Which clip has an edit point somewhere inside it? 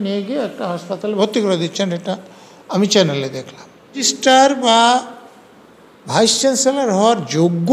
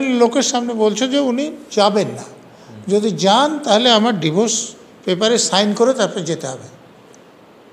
first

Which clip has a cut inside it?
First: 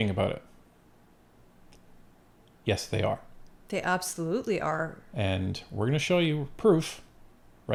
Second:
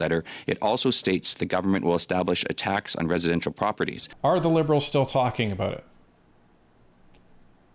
second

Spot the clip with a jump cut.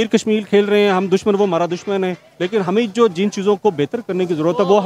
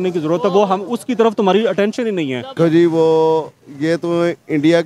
second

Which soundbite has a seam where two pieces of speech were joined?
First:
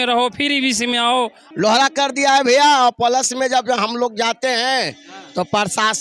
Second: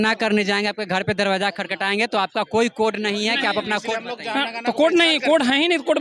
first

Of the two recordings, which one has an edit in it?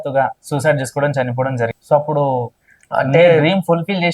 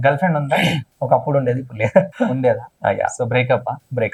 first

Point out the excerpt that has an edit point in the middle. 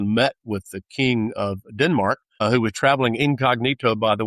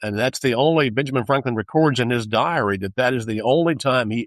first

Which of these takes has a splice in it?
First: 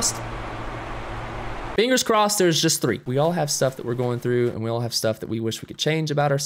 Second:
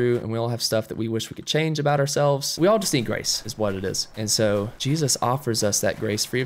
first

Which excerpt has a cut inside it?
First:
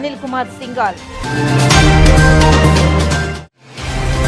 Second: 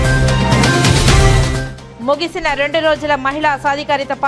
second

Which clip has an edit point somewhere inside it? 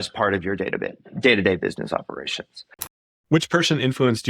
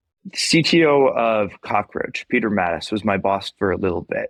first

